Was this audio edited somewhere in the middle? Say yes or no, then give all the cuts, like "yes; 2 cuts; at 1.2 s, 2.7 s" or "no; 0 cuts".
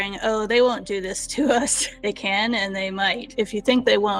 yes; 2 cuts; at 1.9 s, 3.3 s